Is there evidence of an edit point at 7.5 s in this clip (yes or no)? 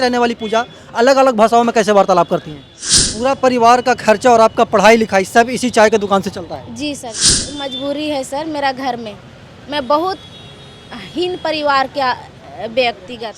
yes